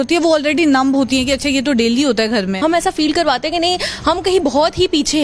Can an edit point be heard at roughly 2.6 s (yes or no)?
yes